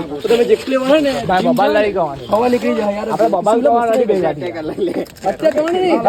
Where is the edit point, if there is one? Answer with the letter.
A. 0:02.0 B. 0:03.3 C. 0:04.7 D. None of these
D